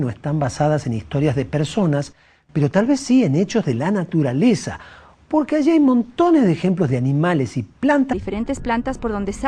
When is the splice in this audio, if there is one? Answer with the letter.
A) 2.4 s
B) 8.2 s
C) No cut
C